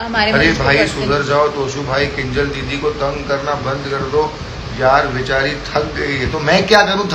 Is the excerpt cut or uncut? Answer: uncut